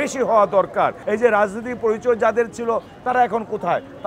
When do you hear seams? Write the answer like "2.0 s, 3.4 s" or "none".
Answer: 1.0 s